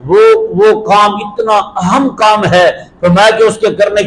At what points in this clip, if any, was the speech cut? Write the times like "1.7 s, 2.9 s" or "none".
none